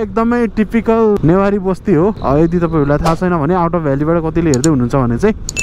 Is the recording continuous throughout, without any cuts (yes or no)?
no